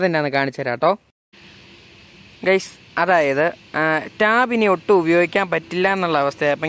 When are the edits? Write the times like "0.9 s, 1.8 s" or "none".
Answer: 1.2 s